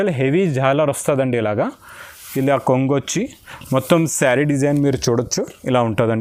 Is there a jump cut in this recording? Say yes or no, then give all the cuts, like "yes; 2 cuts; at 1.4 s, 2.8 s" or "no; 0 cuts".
no; 0 cuts